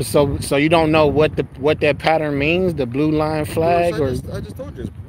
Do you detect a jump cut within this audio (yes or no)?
no